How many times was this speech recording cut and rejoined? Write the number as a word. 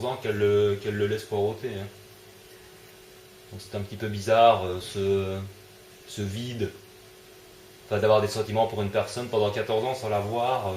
one